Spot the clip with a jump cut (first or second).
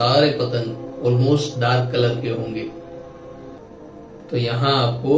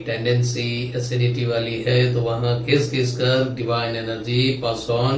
first